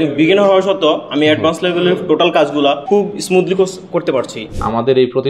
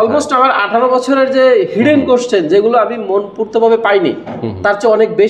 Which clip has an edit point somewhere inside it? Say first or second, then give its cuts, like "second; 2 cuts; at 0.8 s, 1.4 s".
first; 2 cuts; at 2.8 s, 4.4 s